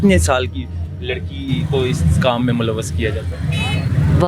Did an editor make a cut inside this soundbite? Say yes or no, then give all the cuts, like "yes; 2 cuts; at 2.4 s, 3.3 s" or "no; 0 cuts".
no; 0 cuts